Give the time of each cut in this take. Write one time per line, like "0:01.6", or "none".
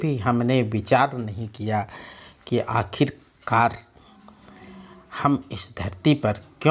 none